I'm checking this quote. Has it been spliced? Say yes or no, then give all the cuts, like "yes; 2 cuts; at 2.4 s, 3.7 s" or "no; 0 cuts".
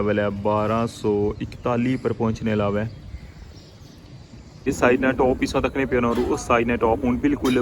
yes; 1 cut; at 4.7 s